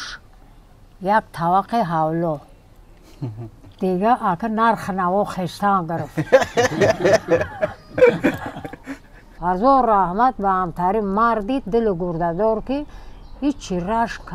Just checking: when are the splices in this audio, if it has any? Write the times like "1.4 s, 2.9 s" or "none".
9.3 s